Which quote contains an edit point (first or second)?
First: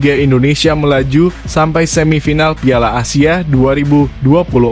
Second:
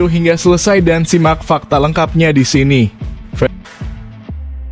second